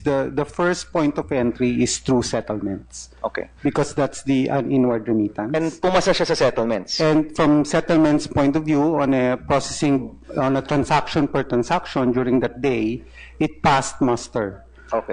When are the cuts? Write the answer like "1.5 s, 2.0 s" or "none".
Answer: none